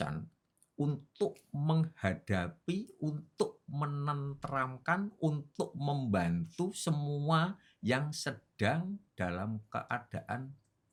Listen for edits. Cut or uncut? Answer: uncut